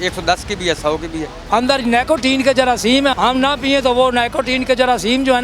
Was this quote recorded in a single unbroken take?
no; 2 cuts; at 1.3 s, 3.1 s

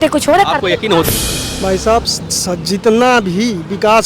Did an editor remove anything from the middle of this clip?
yes; 1 cut; at 1.1 s

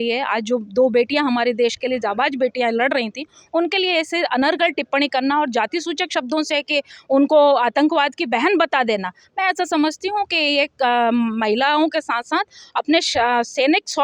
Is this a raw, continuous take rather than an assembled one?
yes; 0 cuts

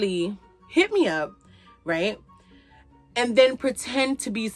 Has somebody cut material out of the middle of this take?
no; 0 cuts

